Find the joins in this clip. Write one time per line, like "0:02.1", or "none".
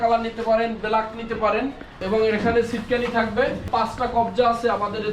0:02.0
0:03.7